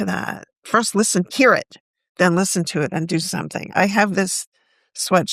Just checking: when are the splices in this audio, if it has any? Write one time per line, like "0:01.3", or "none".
0:01.3
0:03.7